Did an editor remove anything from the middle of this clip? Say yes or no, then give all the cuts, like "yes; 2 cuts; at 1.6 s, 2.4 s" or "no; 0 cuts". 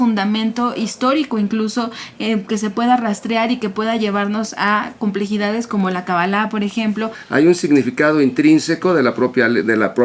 yes; 1 cut; at 7.2 s